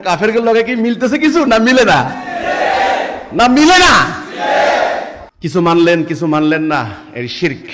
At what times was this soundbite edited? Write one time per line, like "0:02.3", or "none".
none